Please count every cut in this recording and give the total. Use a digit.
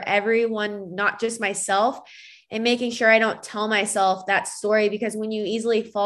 0